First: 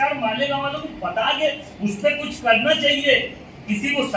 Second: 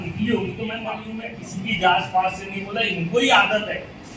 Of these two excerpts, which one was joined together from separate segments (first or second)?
second